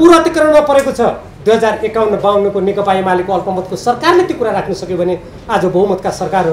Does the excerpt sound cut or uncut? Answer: cut